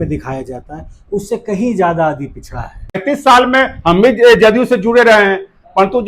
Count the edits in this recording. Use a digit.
1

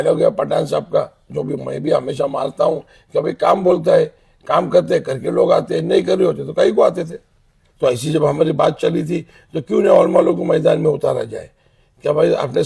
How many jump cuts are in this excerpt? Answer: 1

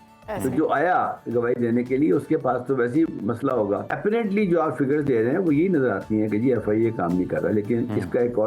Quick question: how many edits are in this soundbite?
1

